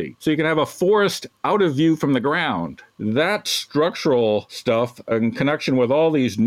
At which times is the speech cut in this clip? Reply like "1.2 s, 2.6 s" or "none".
1.3 s, 2.8 s, 4.9 s